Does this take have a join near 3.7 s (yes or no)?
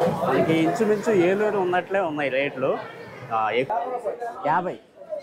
yes